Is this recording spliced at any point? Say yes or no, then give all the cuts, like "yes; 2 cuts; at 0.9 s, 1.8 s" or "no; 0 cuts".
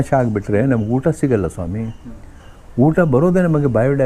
no; 0 cuts